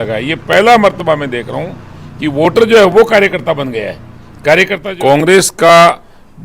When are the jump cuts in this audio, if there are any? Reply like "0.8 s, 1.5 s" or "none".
4.8 s

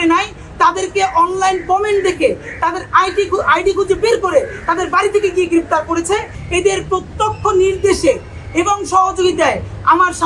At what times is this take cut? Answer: 6.3 s

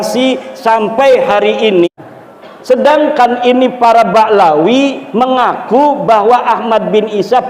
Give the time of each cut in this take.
1.9 s

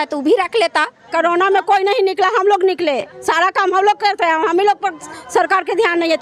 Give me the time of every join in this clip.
1.0 s

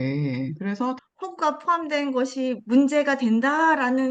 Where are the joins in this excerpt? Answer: 1.0 s

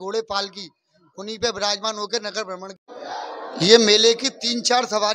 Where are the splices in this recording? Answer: 2.8 s

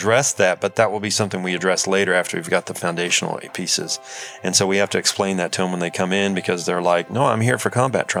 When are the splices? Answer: none

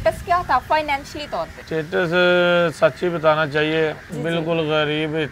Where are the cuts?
1.6 s, 4.1 s

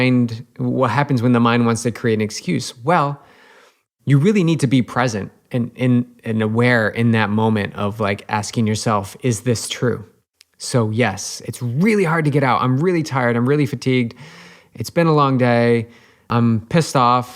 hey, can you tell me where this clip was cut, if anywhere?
16.2 s

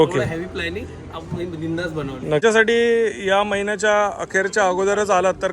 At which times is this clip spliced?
2.4 s

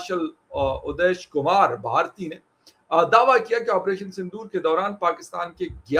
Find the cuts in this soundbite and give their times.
none

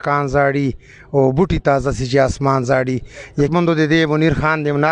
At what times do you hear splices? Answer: 3.5 s

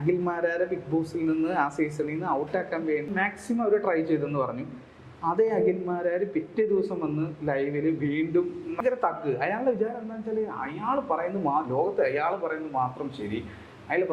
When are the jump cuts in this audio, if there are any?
3.1 s, 8.7 s

